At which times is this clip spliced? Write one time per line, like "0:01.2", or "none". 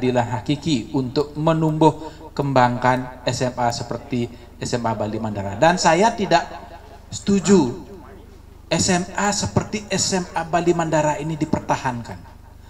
none